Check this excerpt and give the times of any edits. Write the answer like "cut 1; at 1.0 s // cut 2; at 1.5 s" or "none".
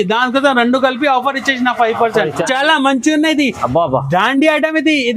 cut 1; at 2.4 s